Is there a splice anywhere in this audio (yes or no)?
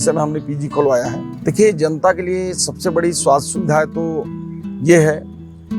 yes